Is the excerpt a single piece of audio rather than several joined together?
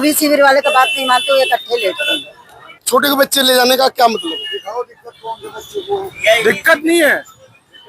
no; 1 cut; at 2.6 s

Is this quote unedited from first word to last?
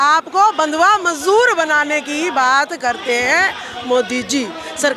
yes; 0 cuts

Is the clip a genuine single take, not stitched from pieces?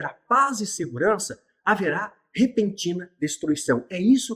yes; 0 cuts

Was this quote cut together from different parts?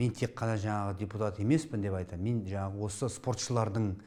no; 0 cuts

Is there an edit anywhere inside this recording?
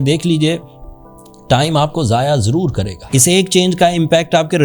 yes; 1 cut; at 3.0 s

